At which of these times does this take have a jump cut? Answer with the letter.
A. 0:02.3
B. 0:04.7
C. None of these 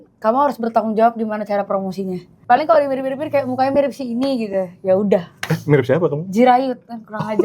A